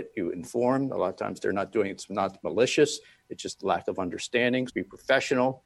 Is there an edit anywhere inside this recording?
yes; 1 cut; at 4.7 s

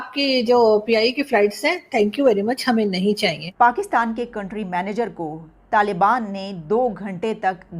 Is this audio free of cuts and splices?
no; 1 cut; at 3.4 s

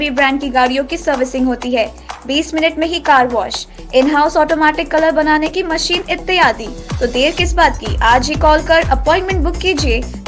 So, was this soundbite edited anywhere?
no; 0 cuts

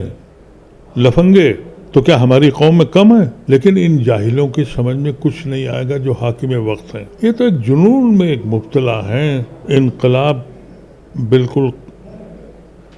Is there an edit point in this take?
yes; 4 cuts; at 1.7 s, 3.4 s, 7.0 s, 9.5 s

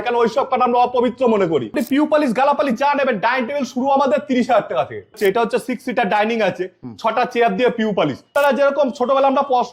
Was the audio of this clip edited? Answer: yes; 3 cuts; at 1.7 s, 5.2 s, 8.3 s

